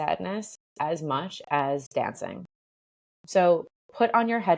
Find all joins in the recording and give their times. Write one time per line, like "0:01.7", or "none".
none